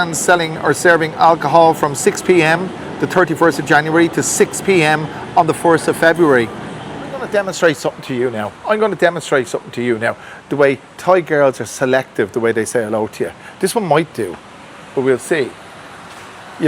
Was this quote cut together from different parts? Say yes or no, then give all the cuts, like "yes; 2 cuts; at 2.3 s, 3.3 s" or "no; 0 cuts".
yes; 1 cut; at 7.2 s